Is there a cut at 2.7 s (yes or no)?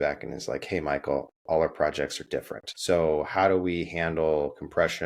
yes